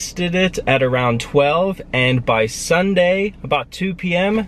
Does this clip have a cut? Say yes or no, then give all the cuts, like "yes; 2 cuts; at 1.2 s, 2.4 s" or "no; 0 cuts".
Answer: no; 0 cuts